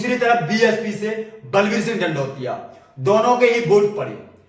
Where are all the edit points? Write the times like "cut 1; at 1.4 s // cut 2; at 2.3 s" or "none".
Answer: none